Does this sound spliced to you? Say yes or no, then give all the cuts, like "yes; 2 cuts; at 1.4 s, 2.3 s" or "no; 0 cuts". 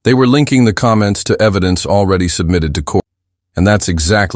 yes; 1 cut; at 3.0 s